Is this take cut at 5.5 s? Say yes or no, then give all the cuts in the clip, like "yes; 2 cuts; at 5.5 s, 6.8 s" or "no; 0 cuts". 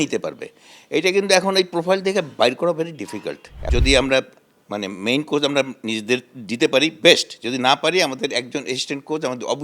no; 1 cut; at 3.6 s